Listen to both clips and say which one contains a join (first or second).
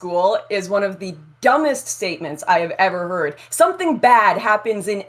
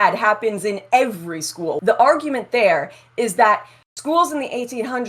second